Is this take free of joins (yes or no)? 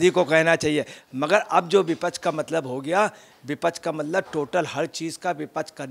no